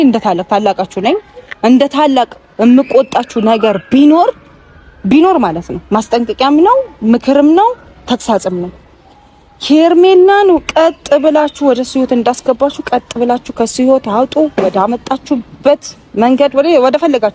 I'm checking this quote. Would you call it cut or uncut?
uncut